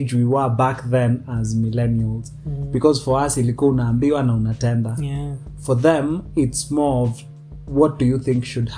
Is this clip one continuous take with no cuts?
yes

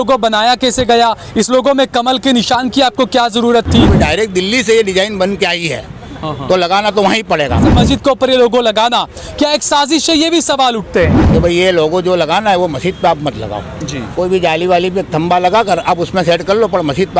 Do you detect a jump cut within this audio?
yes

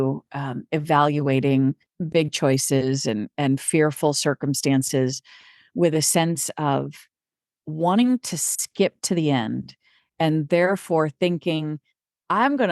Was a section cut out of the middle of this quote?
yes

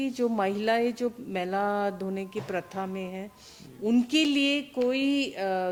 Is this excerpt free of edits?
yes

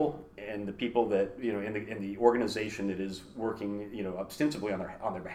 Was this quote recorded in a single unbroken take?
yes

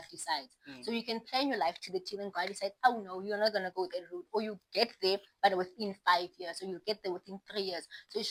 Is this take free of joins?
yes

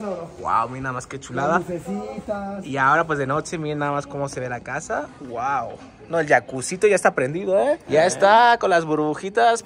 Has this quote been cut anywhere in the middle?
no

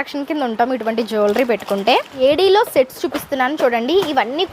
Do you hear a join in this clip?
yes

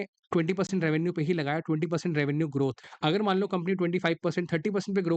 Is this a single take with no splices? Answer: yes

